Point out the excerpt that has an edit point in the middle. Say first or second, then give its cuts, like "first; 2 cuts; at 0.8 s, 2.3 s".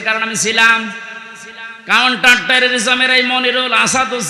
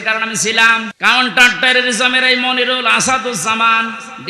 second; 1 cut; at 0.9 s